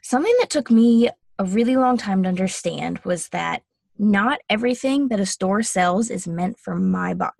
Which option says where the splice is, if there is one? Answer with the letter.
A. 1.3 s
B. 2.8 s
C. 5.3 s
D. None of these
A